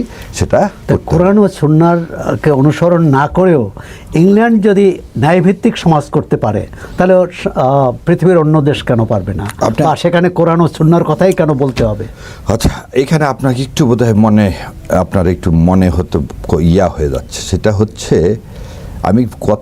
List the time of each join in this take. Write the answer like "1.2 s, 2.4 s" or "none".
none